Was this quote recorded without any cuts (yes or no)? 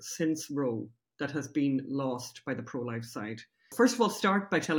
no